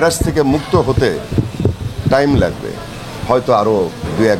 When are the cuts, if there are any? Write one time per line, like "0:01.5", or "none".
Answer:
none